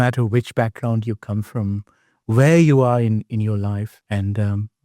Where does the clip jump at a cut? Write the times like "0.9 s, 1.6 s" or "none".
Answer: 3.9 s